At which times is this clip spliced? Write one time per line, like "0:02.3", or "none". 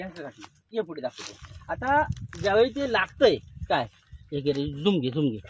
none

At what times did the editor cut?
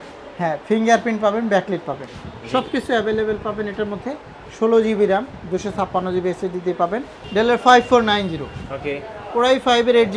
0:07.2

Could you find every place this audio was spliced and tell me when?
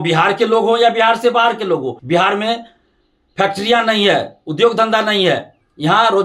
0:02.0

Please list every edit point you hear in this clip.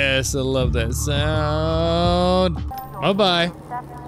0:02.8

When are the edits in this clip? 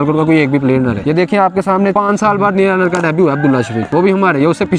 0:01.0
0:01.9
0:03.8

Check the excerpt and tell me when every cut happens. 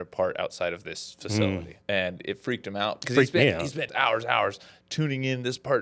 0:01.7
0:03.0
0:03.9

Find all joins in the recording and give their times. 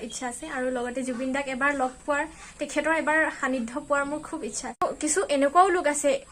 0:04.8

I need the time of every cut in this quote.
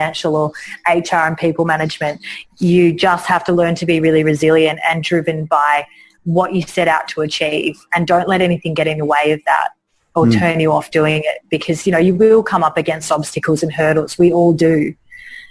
none

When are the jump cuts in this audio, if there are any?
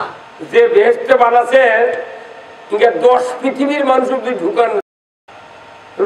0:04.8

